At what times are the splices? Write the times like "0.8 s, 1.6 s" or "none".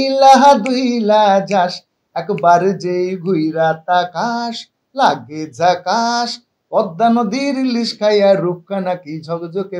none